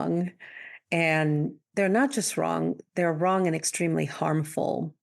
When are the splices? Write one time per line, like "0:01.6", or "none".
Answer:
0:01.6